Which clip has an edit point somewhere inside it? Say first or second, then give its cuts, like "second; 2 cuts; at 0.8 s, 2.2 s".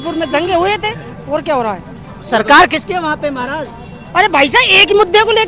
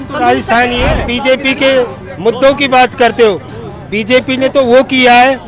second; 1 cut; at 1.0 s